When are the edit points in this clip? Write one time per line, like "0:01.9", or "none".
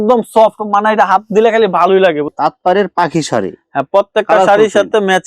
0:02.3